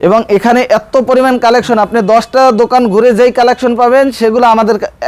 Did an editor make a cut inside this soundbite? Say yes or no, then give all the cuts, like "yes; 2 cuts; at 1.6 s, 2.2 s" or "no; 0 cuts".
no; 0 cuts